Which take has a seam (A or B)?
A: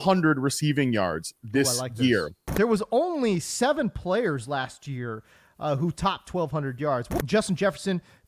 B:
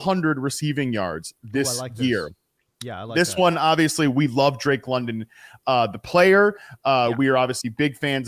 A